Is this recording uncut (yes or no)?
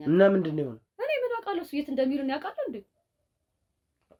yes